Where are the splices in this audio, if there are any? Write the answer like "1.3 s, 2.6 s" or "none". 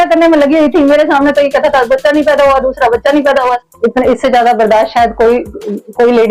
3.6 s